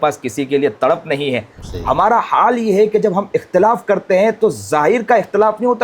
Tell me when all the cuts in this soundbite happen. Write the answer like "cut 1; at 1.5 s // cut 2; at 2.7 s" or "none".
cut 1; at 1.5 s